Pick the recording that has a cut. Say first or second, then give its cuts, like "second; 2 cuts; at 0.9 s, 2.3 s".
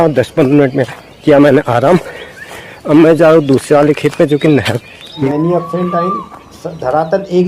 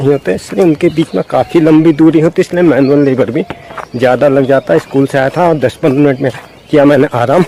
first; 1 cut; at 5.2 s